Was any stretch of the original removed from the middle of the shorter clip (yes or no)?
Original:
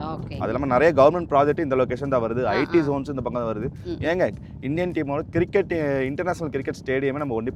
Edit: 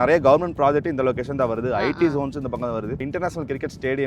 yes